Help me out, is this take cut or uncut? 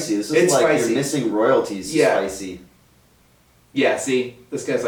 uncut